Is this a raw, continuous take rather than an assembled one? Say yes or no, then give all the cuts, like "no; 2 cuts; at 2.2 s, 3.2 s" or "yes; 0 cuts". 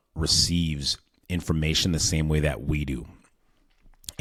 yes; 0 cuts